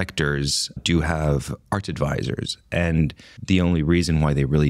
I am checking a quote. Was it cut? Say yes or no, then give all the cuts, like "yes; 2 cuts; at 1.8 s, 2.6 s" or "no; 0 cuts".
yes; 2 cuts; at 0.8 s, 3.3 s